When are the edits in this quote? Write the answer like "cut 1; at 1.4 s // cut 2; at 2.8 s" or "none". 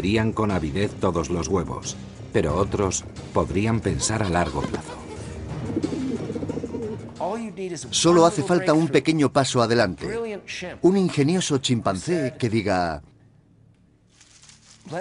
cut 1; at 12.6 s